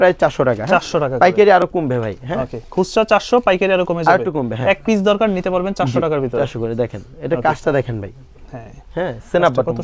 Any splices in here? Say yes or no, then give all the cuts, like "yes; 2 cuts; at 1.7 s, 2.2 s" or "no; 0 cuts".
no; 0 cuts